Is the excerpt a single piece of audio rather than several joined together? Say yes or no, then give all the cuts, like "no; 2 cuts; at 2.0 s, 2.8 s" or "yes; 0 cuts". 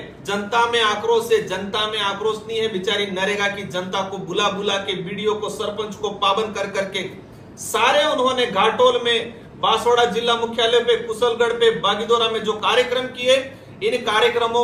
yes; 0 cuts